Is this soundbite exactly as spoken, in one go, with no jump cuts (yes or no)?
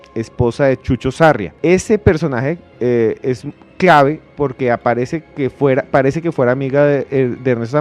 no